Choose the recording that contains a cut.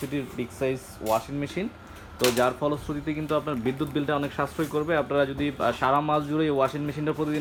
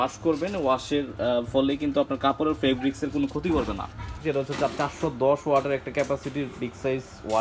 second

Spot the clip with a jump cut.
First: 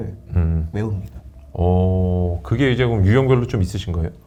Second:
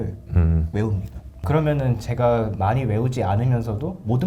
second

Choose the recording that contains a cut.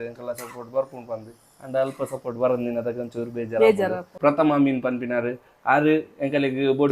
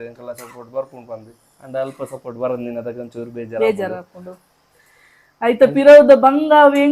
first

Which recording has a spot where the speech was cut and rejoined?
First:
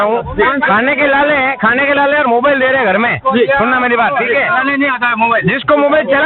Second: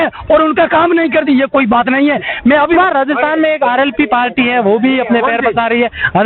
second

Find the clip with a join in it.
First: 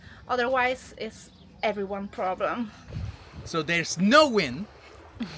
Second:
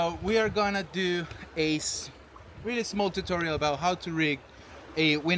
first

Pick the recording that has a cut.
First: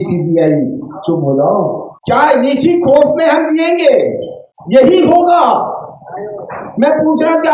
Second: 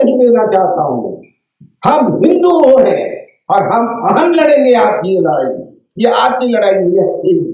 first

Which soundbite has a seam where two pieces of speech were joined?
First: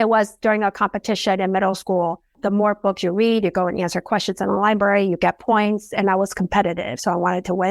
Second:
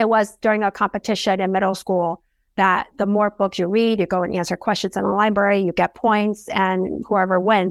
first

